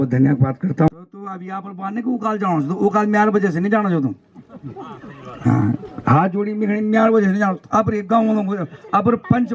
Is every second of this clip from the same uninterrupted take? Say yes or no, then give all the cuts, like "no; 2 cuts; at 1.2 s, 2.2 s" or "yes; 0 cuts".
no; 1 cut; at 1.7 s